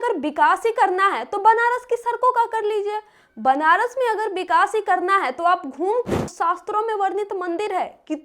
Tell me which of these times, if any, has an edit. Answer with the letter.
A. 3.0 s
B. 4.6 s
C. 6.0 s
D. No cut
C